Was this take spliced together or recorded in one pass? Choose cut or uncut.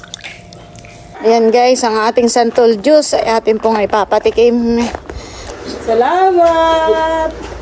cut